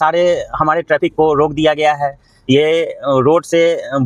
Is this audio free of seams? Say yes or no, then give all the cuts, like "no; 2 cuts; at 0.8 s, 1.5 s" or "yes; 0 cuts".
yes; 0 cuts